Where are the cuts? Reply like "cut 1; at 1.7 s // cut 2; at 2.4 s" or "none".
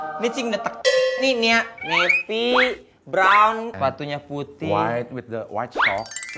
cut 1; at 1.2 s // cut 2; at 3.7 s